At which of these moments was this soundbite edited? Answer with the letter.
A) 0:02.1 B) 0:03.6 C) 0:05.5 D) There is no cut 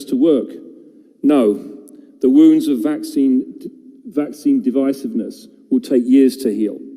D